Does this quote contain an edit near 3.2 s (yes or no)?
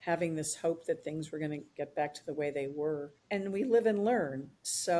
yes